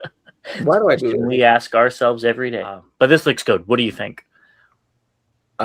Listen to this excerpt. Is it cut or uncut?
cut